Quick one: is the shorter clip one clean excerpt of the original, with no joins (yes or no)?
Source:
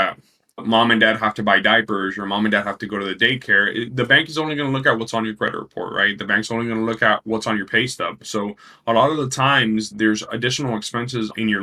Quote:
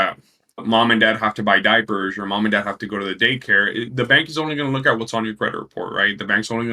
yes